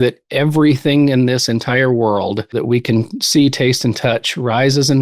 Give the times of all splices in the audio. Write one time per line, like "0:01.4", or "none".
0:02.6